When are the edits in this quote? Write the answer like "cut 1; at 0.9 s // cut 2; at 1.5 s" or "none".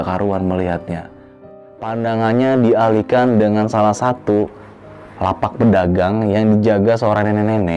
cut 1; at 1.4 s